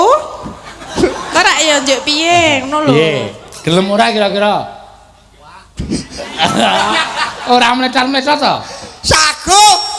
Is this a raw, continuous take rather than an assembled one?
yes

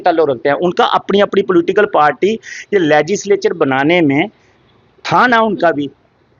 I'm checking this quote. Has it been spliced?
no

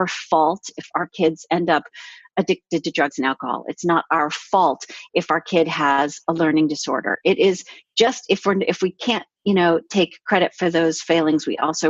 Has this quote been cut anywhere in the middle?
no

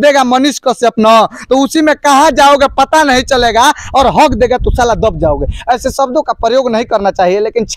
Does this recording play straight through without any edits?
yes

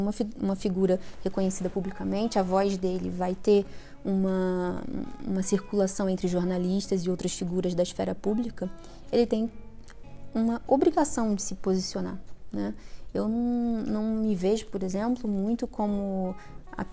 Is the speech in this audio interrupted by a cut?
no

